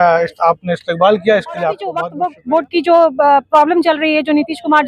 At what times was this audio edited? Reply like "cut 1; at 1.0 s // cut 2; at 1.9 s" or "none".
cut 1; at 2.0 s